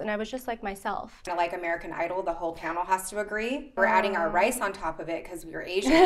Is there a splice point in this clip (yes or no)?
yes